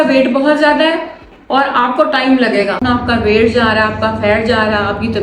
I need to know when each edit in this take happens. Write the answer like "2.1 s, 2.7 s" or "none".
2.8 s